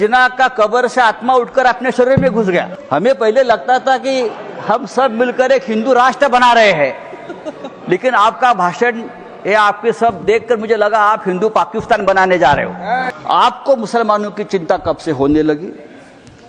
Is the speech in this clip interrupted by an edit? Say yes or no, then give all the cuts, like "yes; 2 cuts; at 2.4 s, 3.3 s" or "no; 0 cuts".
yes; 2 cuts; at 2.8 s, 13.1 s